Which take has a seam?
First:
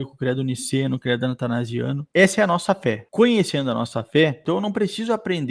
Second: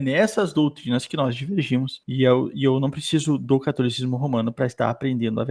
first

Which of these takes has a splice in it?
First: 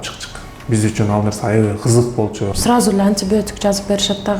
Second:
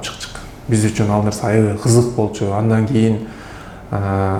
first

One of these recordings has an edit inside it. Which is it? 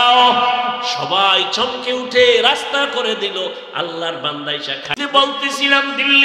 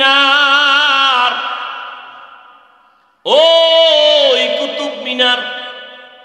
first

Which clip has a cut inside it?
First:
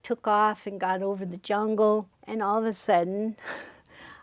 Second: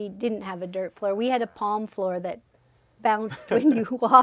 first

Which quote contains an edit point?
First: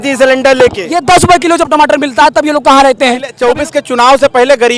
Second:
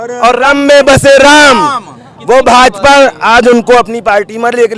first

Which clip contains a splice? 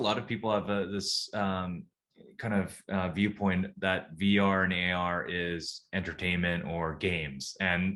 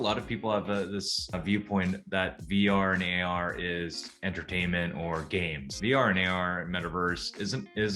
second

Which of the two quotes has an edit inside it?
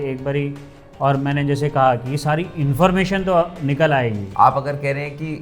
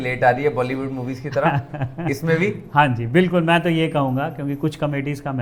first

